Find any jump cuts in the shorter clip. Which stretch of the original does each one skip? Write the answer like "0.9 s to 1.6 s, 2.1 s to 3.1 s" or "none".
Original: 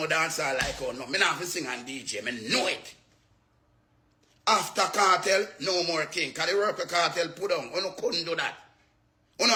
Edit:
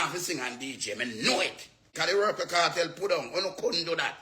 3.1 s to 6.3 s